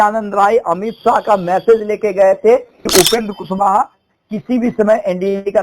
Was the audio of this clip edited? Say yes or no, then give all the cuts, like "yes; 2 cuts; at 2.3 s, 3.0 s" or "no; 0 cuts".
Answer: yes; 1 cut; at 2.8 s